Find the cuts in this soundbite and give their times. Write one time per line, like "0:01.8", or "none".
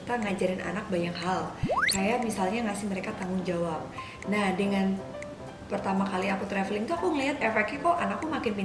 none